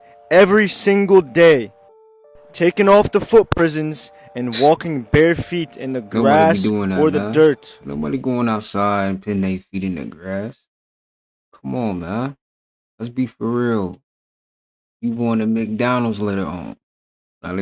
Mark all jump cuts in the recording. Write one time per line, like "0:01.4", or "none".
none